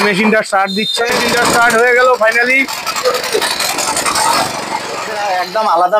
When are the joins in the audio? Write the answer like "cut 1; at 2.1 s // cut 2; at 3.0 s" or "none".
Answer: cut 1; at 1.1 s // cut 2; at 5.2 s

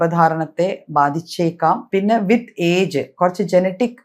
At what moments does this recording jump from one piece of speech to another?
cut 1; at 1.8 s

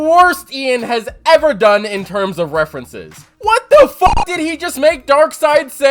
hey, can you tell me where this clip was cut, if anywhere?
none

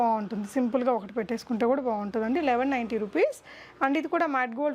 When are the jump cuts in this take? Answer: none

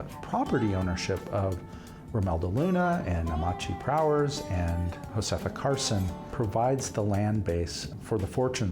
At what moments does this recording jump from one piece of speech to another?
cut 1; at 5.0 s // cut 2; at 6.2 s // cut 3; at 7.8 s

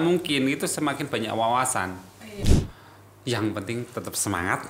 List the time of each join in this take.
cut 1; at 2.5 s

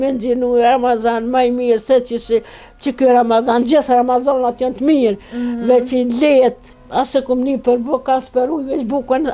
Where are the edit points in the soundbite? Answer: cut 1; at 6.7 s

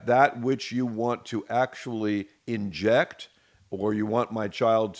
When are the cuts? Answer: none

